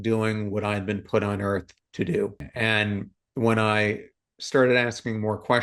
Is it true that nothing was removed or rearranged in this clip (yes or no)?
yes